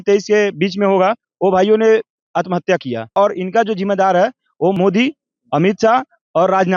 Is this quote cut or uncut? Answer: cut